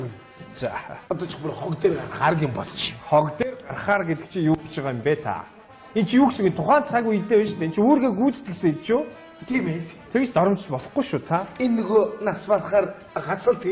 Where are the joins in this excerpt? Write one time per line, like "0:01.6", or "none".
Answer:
0:11.6